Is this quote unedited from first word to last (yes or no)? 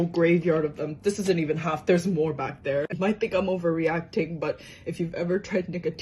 no